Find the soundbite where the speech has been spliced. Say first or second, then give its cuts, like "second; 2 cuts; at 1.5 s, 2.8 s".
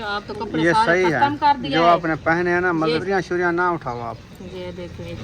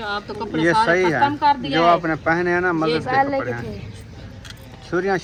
first; 1 cut; at 3.0 s